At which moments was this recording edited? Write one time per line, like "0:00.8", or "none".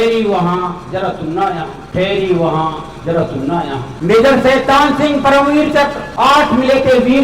0:01.8
0:03.9
0:06.0